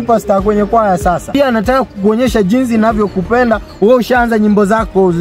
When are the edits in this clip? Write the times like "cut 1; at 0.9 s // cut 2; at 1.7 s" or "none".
cut 1; at 1.3 s